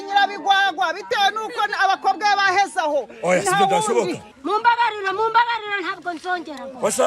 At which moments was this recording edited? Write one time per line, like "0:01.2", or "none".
0:04.2

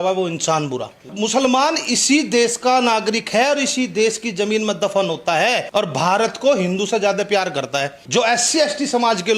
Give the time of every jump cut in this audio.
0:01.1
0:05.6
0:08.0

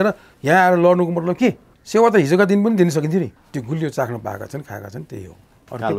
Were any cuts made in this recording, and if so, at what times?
0:01.7
0:03.4

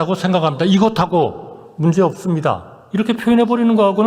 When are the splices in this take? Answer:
none

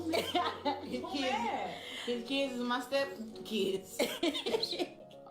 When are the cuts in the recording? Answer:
0:04.1

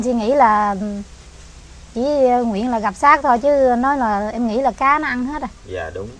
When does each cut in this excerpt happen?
none

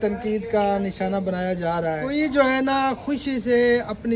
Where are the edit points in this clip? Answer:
0:02.0

